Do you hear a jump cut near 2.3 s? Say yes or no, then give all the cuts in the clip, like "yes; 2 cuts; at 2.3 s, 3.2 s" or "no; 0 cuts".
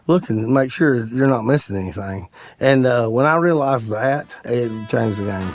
no; 1 cut; at 4.4 s